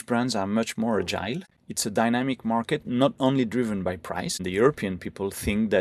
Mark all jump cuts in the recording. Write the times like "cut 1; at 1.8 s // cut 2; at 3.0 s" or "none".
cut 1; at 1.5 s // cut 2; at 4.4 s